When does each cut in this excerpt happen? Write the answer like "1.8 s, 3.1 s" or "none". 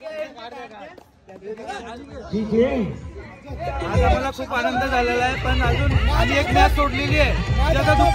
none